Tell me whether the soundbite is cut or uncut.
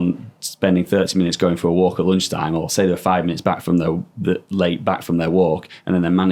uncut